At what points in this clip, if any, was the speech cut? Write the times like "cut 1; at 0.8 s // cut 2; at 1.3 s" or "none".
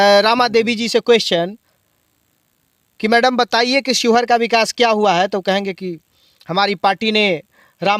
none